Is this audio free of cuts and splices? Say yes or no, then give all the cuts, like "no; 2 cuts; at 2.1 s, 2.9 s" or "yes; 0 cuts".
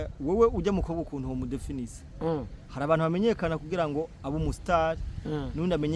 yes; 0 cuts